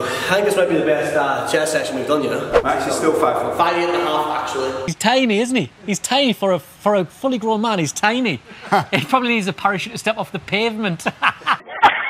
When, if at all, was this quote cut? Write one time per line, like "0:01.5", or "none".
0:02.5

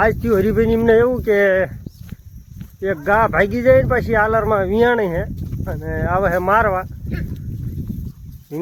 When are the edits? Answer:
none

